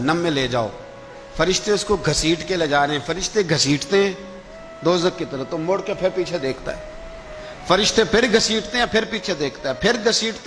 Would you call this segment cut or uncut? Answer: uncut